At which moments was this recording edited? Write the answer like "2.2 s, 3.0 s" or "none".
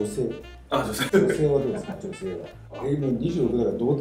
1.1 s, 2.7 s